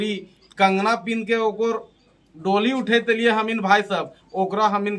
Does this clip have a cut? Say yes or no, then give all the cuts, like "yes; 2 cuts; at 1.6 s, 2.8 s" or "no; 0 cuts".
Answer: no; 0 cuts